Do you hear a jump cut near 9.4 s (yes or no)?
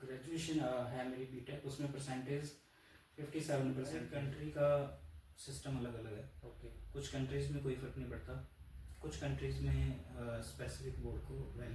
no